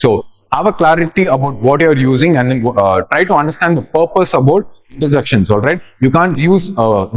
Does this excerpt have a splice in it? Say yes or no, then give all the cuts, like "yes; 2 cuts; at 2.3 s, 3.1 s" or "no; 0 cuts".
no; 0 cuts